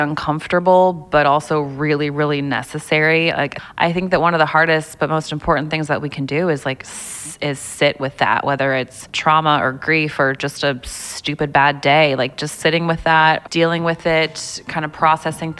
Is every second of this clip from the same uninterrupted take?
no; 3 cuts; at 3.6 s, 9.0 s, 13.5 s

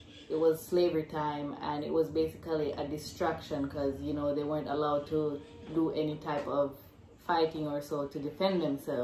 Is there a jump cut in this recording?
no; 0 cuts

